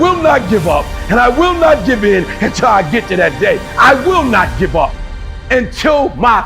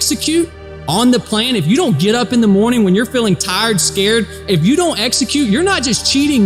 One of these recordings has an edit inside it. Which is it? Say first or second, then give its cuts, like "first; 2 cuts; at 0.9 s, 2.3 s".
first; 2 cuts; at 3.7 s, 5.2 s